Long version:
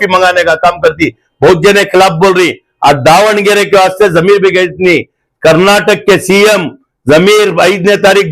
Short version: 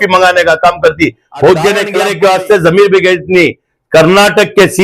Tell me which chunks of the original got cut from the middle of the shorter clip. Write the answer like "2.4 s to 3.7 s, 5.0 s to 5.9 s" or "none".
1.9 s to 3.4 s